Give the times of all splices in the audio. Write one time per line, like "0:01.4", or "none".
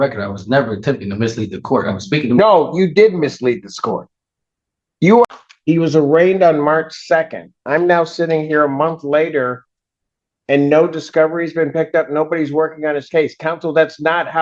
0:05.3